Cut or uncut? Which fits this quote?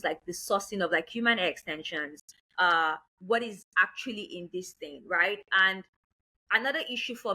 uncut